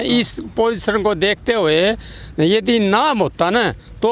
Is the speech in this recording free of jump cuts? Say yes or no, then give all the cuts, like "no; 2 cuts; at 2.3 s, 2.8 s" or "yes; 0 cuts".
yes; 0 cuts